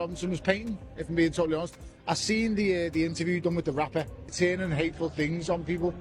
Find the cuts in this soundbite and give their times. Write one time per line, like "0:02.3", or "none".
0:04.3